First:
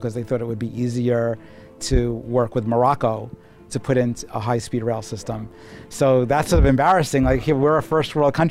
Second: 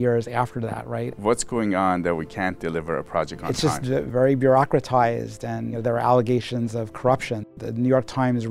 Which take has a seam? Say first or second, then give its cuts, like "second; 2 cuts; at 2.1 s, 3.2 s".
second; 4 cuts; at 1.1 s, 4.1 s, 5.8 s, 7.5 s